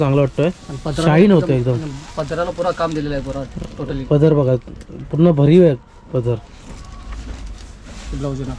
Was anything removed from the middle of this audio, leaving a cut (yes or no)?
no